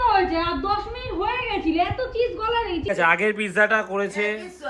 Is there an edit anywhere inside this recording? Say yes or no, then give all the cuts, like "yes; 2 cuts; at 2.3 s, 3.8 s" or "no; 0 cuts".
yes; 1 cut; at 2.8 s